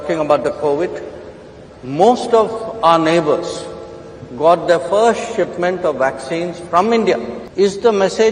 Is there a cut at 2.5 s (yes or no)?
no